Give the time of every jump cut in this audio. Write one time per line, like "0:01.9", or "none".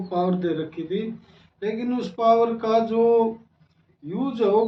none